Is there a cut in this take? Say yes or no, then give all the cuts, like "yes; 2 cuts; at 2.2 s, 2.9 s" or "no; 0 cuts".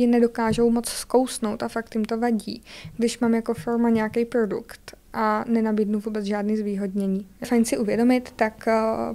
yes; 1 cut; at 7.5 s